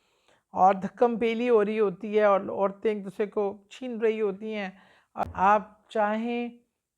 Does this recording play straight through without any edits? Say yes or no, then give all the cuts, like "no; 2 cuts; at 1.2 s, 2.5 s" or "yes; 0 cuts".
no; 1 cut; at 5.2 s